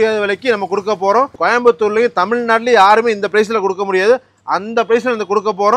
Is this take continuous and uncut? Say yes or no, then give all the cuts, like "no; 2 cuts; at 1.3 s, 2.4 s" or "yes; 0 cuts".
no; 1 cut; at 1.4 s